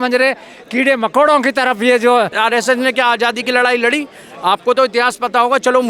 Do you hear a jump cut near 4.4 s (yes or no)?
no